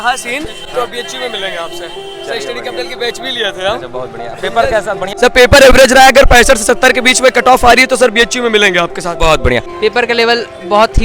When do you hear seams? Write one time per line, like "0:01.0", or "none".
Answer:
0:05.1
0:09.7